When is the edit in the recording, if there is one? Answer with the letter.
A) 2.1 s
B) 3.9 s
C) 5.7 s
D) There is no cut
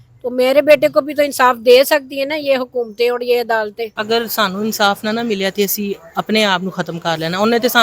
B